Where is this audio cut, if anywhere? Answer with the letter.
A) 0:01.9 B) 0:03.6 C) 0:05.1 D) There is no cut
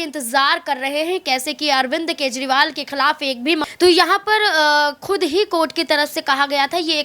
B